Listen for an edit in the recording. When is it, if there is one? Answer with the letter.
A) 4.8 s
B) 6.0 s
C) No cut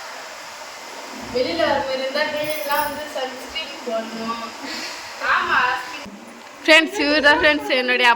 B